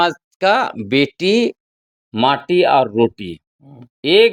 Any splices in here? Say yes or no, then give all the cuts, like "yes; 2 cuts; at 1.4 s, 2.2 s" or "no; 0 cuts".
no; 0 cuts